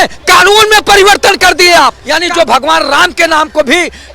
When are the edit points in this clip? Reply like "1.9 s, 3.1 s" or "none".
2.0 s